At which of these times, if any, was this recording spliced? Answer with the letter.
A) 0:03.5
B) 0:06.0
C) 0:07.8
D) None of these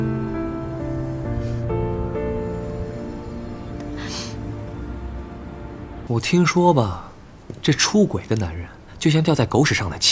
B